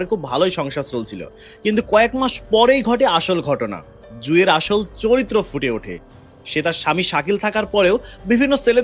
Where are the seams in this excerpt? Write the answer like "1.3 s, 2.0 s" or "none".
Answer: none